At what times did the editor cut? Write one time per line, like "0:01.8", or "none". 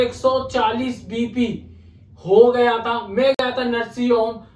none